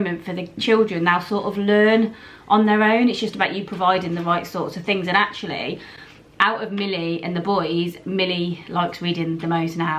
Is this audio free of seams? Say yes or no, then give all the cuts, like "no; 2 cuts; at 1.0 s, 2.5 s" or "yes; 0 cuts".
yes; 0 cuts